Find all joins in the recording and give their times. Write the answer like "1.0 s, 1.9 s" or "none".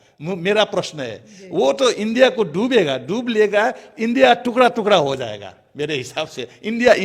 none